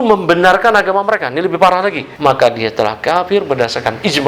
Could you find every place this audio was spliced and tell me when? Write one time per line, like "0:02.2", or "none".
0:02.1